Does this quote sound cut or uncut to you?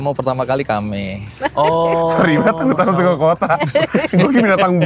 uncut